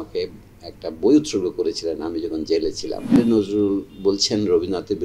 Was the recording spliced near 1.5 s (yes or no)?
no